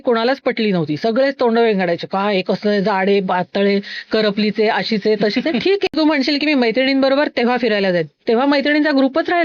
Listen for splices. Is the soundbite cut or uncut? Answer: cut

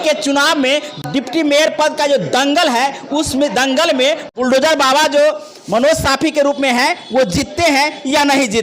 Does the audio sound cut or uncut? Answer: cut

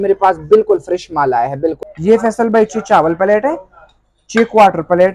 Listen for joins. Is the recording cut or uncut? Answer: cut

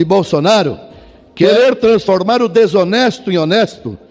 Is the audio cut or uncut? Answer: cut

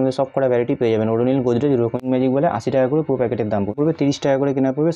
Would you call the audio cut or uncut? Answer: cut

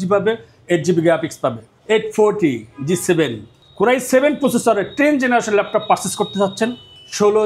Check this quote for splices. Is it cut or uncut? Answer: cut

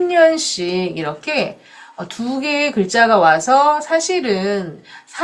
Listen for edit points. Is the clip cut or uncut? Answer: uncut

